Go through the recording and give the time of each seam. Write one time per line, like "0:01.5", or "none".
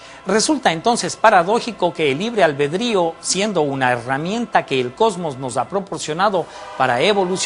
0:02.3